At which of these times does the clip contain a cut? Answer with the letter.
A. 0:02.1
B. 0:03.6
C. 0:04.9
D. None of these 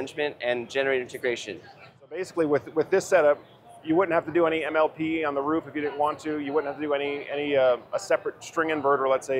A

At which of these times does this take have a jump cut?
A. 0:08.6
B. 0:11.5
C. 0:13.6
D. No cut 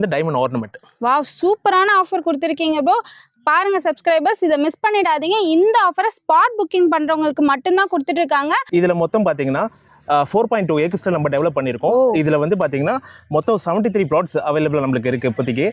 A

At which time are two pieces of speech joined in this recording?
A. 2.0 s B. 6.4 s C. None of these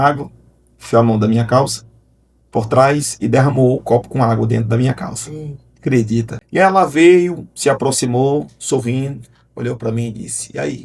B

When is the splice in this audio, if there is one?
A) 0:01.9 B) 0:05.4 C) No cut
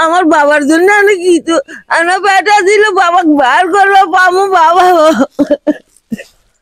C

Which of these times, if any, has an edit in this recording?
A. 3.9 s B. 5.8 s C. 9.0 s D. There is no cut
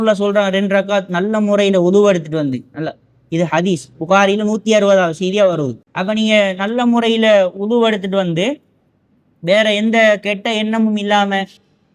B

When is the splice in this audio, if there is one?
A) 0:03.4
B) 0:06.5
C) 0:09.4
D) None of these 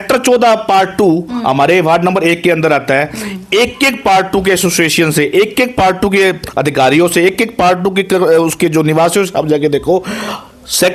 D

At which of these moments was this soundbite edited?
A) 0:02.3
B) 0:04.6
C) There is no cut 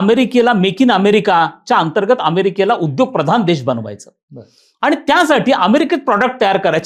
C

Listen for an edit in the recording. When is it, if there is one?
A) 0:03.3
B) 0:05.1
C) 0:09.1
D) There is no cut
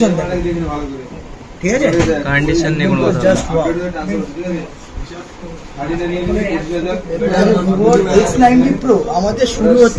D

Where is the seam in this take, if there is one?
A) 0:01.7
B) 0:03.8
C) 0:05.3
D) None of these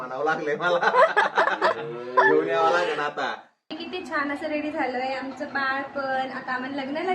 B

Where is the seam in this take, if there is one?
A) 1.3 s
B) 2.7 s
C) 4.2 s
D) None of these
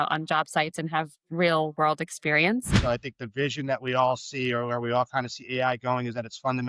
B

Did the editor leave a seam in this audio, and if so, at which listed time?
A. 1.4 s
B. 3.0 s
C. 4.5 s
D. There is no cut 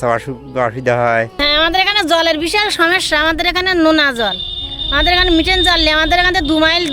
A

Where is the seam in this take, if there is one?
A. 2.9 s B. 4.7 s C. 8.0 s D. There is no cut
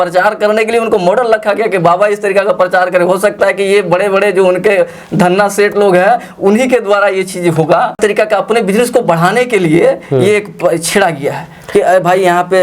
C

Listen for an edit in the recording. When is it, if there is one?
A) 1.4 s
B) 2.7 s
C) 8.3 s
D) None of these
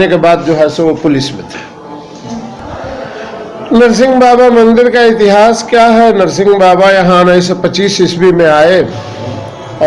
B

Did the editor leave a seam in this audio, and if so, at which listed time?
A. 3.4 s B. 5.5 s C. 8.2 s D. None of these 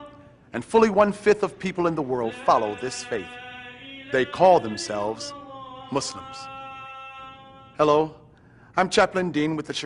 A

